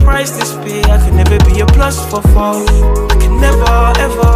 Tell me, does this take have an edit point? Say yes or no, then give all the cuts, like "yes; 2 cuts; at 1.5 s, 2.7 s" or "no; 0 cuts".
no; 0 cuts